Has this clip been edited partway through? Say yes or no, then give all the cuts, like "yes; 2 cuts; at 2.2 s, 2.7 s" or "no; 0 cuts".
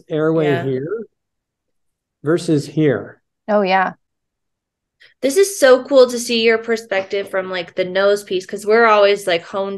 no; 0 cuts